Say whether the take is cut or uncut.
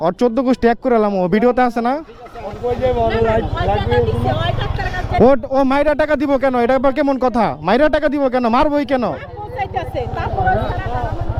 uncut